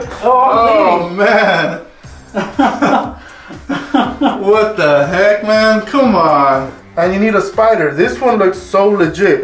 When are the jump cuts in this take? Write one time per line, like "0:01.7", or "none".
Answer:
0:06.8